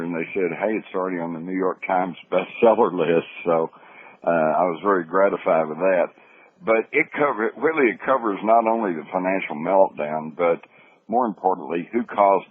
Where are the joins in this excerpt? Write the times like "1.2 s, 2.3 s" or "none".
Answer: 4.8 s